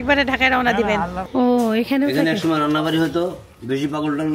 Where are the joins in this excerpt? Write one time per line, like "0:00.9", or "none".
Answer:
0:01.2